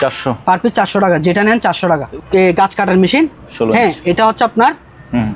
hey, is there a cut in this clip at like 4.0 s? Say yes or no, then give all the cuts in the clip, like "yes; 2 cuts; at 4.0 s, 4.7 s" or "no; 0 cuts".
no; 1 cut; at 2.1 s